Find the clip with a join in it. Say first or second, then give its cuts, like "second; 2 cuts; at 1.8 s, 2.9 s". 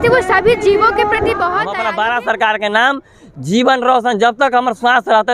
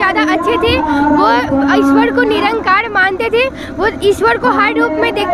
first; 1 cut; at 1.8 s